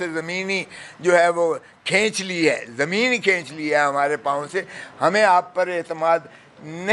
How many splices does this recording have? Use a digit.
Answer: 0